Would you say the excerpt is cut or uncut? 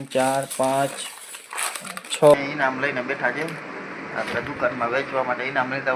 cut